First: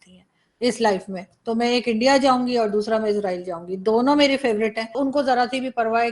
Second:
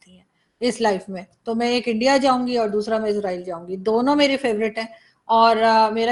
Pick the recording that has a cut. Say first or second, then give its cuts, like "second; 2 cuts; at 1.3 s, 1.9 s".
first; 1 cut; at 5.0 s